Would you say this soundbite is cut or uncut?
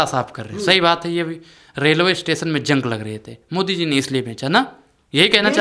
uncut